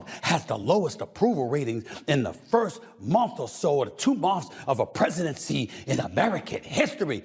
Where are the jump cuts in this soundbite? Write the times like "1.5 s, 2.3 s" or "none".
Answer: none